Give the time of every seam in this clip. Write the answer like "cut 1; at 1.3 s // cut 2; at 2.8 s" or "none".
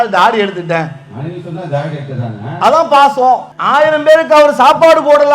cut 1; at 3.5 s